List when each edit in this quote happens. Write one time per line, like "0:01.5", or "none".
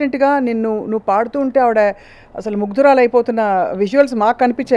none

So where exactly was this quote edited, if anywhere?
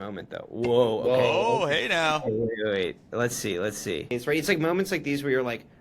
0:04.1

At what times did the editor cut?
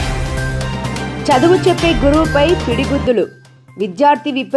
0:01.2

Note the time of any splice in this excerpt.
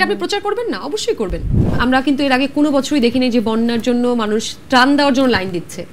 0:01.6

